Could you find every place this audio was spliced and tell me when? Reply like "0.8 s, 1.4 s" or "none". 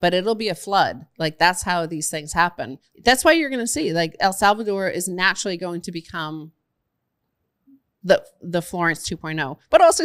2.8 s